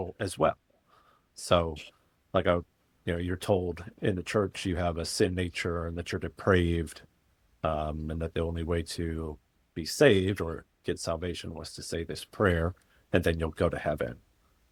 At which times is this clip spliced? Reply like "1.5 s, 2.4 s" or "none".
none